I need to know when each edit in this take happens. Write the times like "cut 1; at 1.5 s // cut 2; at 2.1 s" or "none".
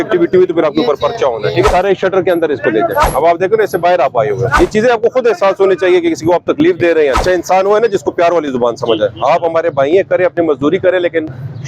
cut 1; at 1.7 s // cut 2; at 3.0 s // cut 3; at 4.5 s // cut 4; at 7.2 s